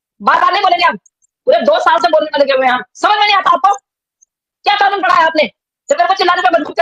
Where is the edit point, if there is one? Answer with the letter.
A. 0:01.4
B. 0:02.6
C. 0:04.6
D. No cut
A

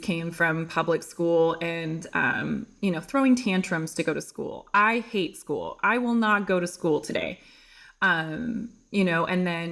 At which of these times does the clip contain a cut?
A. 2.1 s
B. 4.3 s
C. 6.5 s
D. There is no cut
D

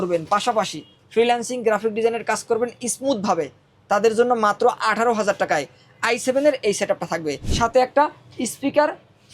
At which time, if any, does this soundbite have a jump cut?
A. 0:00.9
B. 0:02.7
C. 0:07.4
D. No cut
C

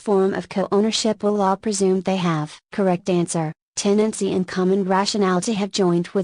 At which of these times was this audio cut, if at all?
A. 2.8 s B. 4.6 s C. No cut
B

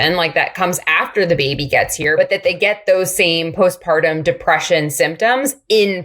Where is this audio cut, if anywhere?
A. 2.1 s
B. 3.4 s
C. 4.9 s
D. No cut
A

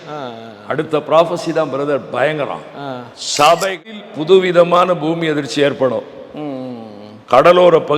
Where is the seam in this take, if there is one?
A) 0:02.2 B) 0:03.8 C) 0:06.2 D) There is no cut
B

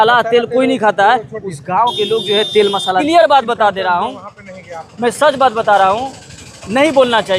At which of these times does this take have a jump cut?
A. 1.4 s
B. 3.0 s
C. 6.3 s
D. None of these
B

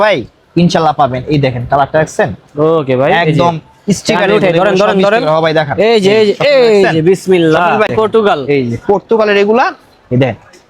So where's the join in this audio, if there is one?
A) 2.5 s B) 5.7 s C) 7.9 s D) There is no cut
C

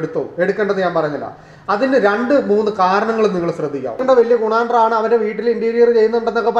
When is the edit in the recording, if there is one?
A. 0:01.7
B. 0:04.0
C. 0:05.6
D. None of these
B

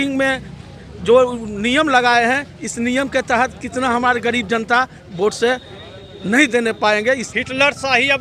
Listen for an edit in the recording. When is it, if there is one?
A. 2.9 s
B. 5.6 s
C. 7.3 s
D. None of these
C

